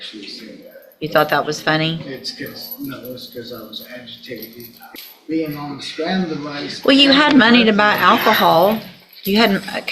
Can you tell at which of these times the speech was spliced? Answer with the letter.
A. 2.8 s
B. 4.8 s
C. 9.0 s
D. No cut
B